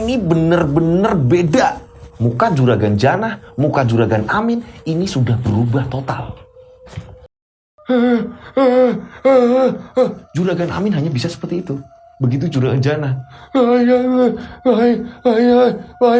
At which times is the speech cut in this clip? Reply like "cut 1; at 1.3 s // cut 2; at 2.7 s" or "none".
cut 1; at 7.2 s